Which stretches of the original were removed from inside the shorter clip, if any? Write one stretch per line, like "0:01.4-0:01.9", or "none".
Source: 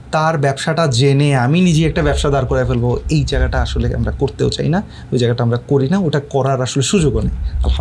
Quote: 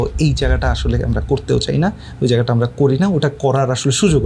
none